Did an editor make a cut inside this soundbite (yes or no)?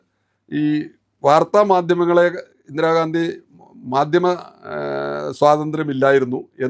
no